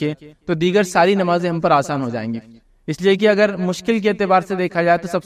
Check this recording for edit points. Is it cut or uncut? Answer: uncut